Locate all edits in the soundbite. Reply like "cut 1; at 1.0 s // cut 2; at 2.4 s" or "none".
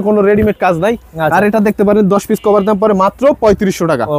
none

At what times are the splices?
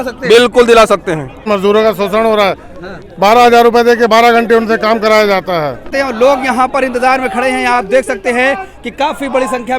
cut 1; at 1.5 s // cut 2; at 5.9 s

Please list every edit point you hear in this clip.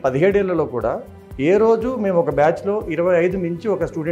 none

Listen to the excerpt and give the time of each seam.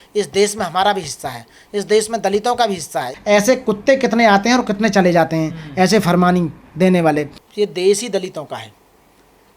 cut 1; at 3.1 s // cut 2; at 7.4 s

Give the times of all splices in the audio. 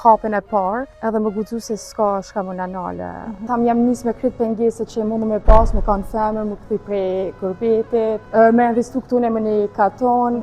cut 1; at 0.9 s // cut 2; at 3.5 s // cut 3; at 8.2 s

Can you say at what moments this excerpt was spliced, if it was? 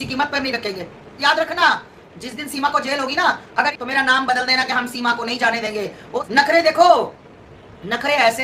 cut 1; at 1.1 s // cut 2; at 3.7 s // cut 3; at 6.2 s

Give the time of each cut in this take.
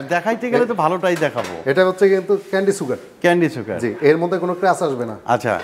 none

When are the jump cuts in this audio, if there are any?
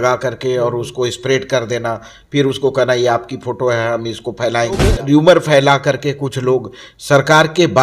cut 1; at 5.0 s

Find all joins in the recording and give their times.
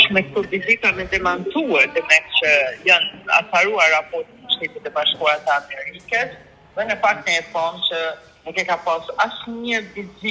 none

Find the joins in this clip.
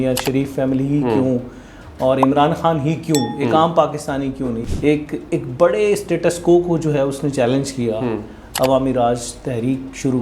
cut 1; at 4.6 s

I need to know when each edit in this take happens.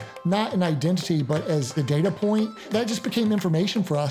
cut 1; at 1.7 s // cut 2; at 2.7 s

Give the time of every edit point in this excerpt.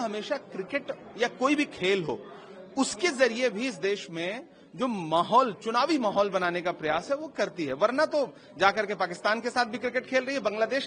none

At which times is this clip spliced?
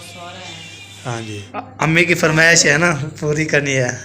cut 1; at 1.4 s

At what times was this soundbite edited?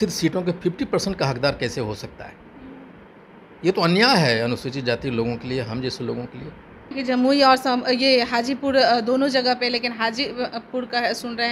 cut 1; at 6.9 s

